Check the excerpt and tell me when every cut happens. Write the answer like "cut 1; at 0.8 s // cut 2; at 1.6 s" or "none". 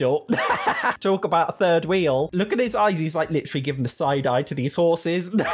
none